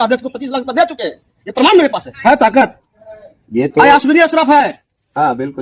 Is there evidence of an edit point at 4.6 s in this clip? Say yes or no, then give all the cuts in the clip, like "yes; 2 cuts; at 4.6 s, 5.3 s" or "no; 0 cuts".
no; 1 cut; at 2.1 s